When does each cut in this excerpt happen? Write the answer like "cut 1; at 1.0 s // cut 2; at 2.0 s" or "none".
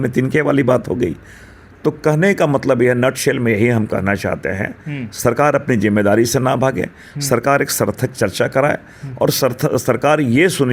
none